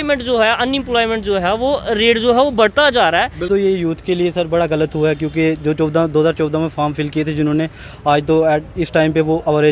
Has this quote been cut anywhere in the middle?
yes; 1 cut; at 3.5 s

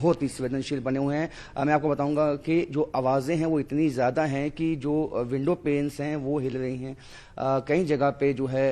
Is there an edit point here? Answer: no; 0 cuts

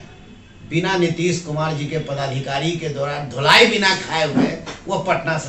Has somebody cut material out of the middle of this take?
no; 0 cuts

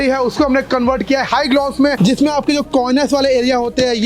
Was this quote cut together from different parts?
no; 0 cuts

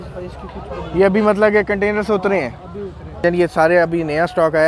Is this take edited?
yes; 1 cut; at 3.2 s

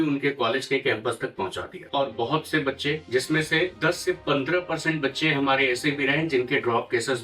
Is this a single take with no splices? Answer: yes; 0 cuts

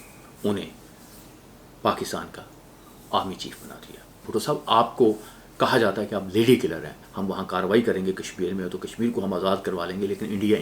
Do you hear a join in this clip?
yes; 2 cuts; at 4.2 s, 7.0 s

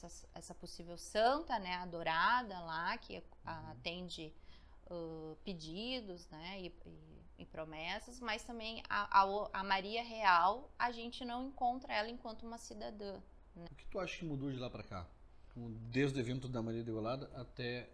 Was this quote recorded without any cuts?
no; 1 cut; at 13.7 s

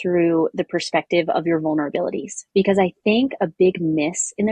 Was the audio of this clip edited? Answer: no; 0 cuts

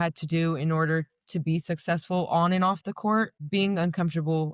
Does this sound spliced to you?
yes; 1 cut; at 3.4 s

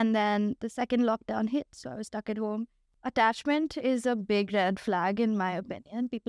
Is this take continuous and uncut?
no; 1 cut; at 2.8 s

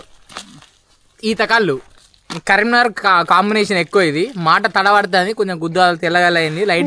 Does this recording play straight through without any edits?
yes; 0 cuts

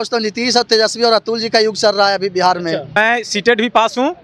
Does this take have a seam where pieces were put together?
yes; 1 cut; at 2.9 s

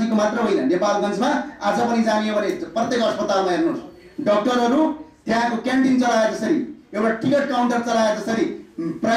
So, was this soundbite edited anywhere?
no; 0 cuts

